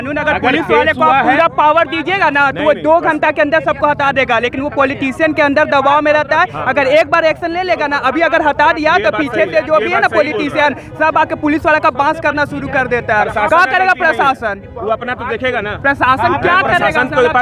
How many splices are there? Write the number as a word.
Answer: zero